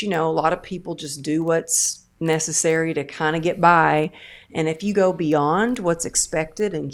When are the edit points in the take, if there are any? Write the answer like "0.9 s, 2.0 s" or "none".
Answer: none